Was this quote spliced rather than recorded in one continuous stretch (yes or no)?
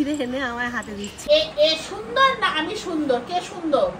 yes